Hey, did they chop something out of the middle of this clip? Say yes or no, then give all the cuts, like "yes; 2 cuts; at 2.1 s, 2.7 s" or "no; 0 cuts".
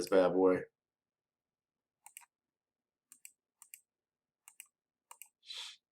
no; 0 cuts